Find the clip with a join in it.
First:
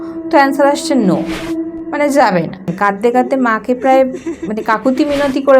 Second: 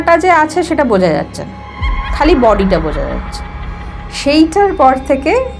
first; 1 cut; at 2.7 s

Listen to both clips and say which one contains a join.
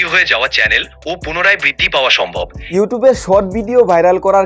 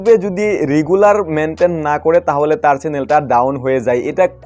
first; 1 cut; at 2.6 s

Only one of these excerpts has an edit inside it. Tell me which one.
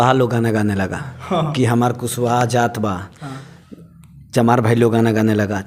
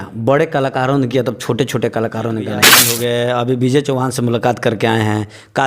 second; 1 cut; at 2.8 s

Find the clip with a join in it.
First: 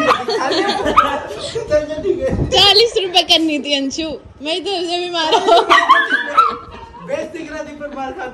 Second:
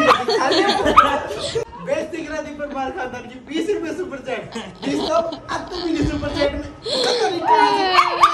second; 1 cut; at 1.6 s

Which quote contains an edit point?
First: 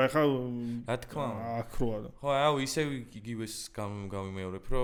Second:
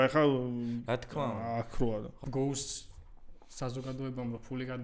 second; 1 cut; at 2.1 s

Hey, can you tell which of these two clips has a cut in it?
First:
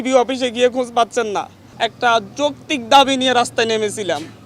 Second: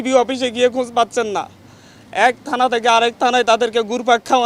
first; 1 cut; at 1.6 s

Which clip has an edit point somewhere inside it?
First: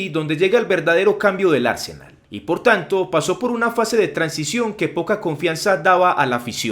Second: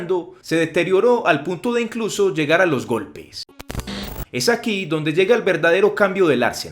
second; 1 cut; at 3.7 s

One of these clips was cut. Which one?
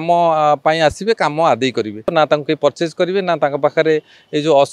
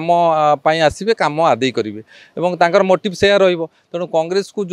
first; 1 cut; at 2.1 s

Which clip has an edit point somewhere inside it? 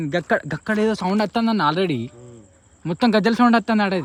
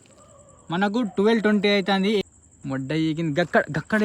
second; 1 cut; at 2.2 s

